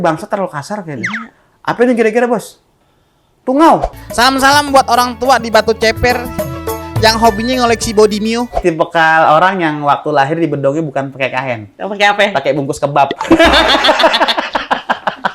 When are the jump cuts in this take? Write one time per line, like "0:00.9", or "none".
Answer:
0:04.0
0:08.6